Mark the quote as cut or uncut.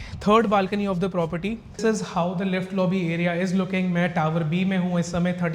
cut